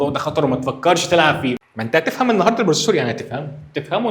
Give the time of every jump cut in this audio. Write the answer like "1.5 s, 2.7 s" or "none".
1.6 s